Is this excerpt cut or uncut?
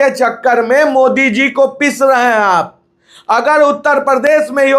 uncut